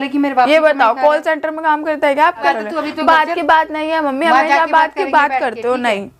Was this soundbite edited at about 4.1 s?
no; 1 cut; at 2.4 s

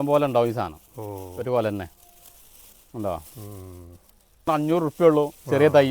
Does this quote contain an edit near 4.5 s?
yes; 1 cut; at 4.5 s

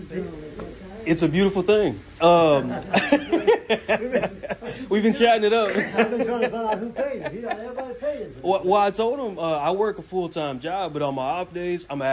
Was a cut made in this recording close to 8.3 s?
no; 0 cuts

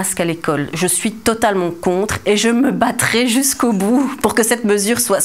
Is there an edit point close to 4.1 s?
yes; 1 cut; at 4.1 s

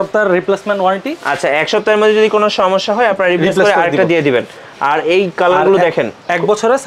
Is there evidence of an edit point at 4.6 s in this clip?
no; 0 cuts

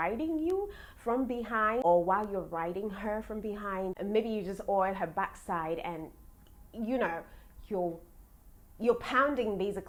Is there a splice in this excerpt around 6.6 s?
no; 0 cuts

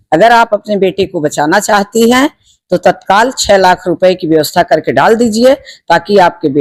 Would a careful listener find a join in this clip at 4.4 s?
no; 0 cuts

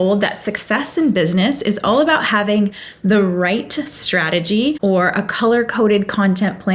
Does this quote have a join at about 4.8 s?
yes; 1 cut; at 4.8 s

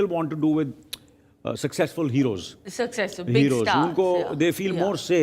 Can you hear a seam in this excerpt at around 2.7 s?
no; 0 cuts

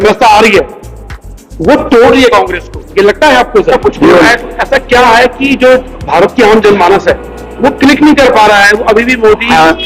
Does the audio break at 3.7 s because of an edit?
yes; 1 cut; at 3.7 s

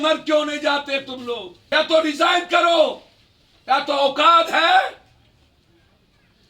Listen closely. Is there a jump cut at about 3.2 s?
no; 1 cut; at 1.5 s

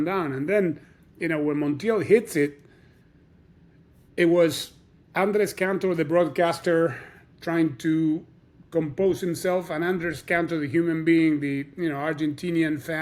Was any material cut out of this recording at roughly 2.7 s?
no; 0 cuts

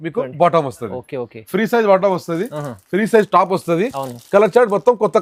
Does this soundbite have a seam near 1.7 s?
no; 0 cuts

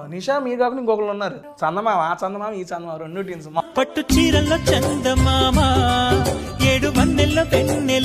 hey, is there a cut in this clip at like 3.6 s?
yes; 2 cuts; at 1.4 s, 3.6 s

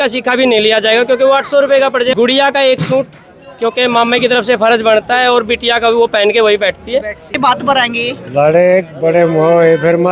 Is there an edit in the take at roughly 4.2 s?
no; 2 cuts; at 2.1 s, 7.3 s

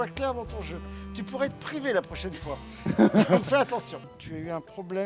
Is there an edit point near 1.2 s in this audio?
no; 1 cut; at 4.0 s

